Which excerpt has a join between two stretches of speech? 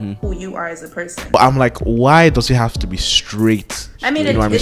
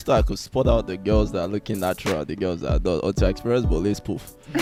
first; 1 cut; at 1.3 s

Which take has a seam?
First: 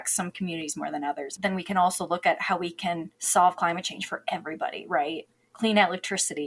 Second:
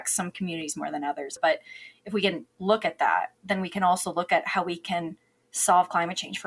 first; 2 cuts; at 1.3 s, 3.1 s

